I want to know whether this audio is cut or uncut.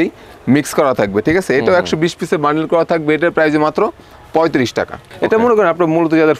cut